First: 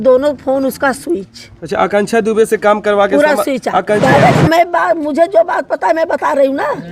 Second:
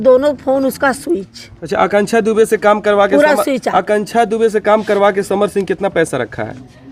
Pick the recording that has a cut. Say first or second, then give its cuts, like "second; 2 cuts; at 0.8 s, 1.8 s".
first; 1 cut; at 4.0 s